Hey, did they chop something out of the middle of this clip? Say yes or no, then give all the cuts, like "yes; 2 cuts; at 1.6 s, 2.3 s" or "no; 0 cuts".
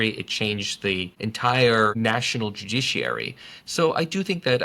yes; 2 cuts; at 1.1 s, 1.9 s